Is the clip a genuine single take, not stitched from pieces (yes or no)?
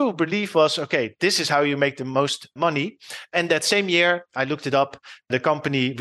no